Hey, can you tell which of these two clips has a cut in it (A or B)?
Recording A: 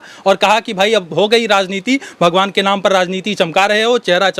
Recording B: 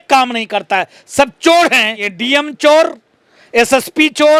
B